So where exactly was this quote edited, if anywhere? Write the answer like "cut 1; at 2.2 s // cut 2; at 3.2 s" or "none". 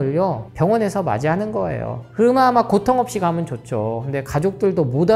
none